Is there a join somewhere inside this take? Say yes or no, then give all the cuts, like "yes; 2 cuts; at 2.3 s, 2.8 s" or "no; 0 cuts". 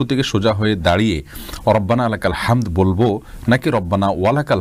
no; 0 cuts